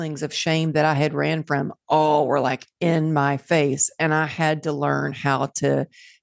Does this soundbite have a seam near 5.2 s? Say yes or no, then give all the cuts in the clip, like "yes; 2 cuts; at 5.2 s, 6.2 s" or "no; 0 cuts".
no; 0 cuts